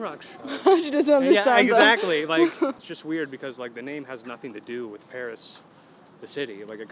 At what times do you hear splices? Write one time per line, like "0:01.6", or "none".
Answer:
0:02.9